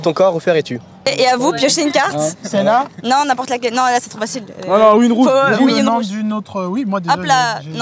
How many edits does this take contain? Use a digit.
1